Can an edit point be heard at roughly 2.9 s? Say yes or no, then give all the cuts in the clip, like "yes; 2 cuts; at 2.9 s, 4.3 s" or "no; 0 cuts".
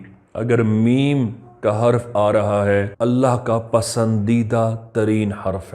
yes; 1 cut; at 2.9 s